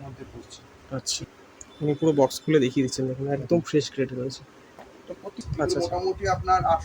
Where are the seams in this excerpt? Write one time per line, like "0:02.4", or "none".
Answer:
0:01.3
0:05.4